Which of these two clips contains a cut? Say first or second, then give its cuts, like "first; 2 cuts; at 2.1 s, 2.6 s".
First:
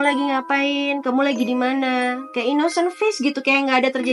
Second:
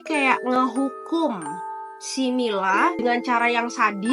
second; 1 cut; at 3.0 s